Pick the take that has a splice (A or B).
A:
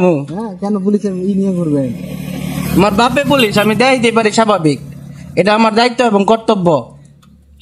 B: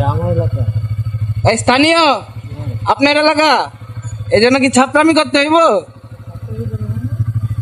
B